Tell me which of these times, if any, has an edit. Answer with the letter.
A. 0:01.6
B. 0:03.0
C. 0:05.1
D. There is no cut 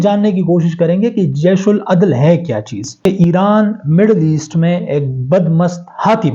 B